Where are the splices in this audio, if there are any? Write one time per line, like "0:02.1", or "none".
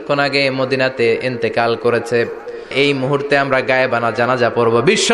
0:02.7